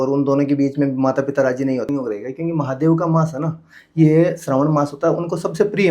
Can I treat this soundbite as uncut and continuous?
no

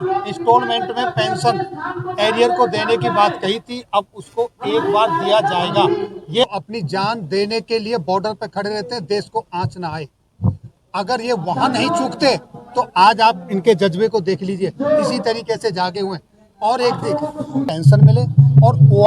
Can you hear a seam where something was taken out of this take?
yes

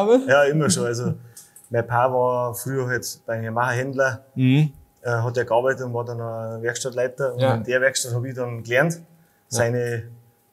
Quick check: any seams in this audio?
no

